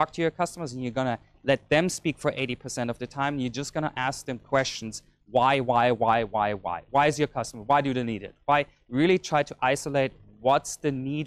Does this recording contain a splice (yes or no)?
no